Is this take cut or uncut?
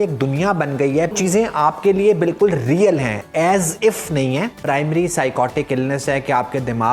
cut